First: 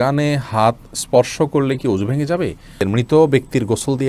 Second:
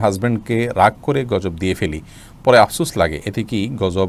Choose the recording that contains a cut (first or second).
first